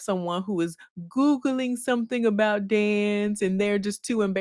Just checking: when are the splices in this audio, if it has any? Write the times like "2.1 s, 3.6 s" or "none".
none